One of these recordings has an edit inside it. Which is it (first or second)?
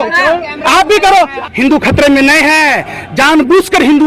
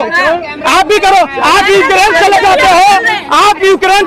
first